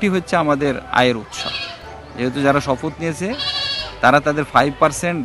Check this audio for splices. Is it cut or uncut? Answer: uncut